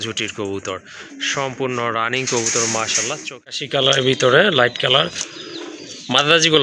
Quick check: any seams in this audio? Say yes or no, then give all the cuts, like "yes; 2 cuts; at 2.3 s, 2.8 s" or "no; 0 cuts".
yes; 1 cut; at 3.6 s